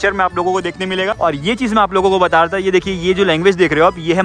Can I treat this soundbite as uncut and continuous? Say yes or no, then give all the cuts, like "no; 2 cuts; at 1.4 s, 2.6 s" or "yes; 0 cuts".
no; 1 cut; at 1.1 s